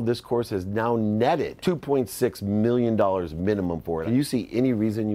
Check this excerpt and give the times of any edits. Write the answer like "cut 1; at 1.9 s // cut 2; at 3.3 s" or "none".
cut 1; at 1.5 s // cut 2; at 4.0 s